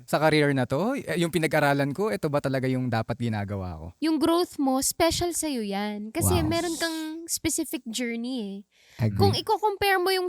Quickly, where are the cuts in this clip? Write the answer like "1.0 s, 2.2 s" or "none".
3.9 s